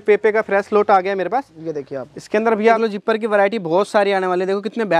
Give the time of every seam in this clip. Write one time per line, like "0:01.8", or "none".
0:02.8